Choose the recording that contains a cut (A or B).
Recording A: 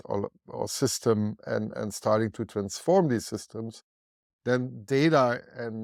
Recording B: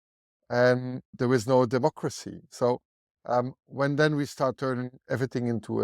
B